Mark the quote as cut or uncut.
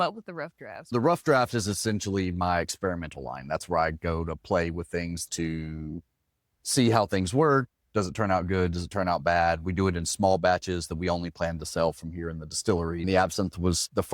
cut